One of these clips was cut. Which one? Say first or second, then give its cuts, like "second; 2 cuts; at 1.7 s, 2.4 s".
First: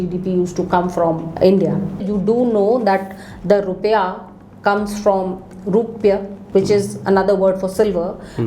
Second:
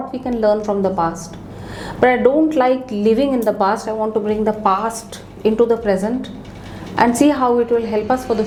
first; 3 cuts; at 1.3 s, 2.0 s, 6.4 s